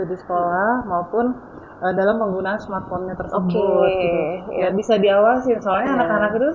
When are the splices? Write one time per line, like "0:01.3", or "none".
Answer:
none